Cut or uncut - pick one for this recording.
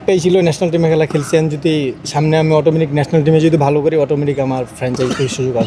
uncut